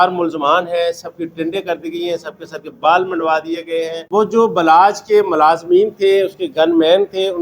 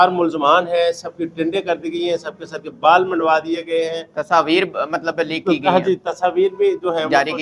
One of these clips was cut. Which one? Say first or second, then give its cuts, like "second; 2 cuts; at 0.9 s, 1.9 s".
first; 1 cut; at 4.0 s